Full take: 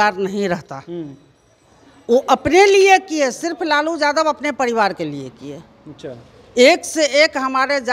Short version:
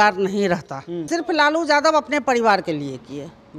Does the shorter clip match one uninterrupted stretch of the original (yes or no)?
no